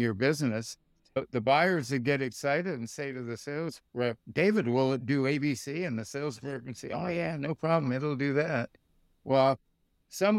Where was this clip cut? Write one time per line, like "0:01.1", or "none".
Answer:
0:01.4